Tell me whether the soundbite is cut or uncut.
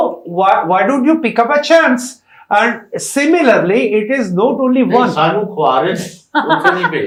uncut